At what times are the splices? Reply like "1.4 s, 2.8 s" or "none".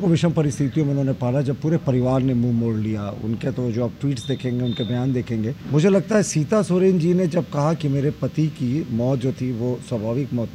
5.6 s